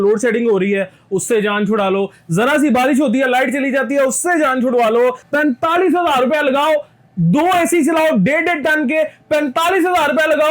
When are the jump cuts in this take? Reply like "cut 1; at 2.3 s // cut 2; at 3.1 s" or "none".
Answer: cut 1; at 5.2 s